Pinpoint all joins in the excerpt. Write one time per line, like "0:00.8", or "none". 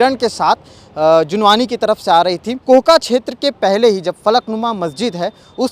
0:02.5